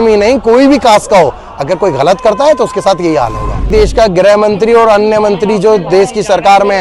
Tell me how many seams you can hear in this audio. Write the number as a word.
one